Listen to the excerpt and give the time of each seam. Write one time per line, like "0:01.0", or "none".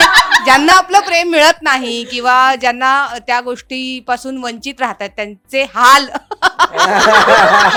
none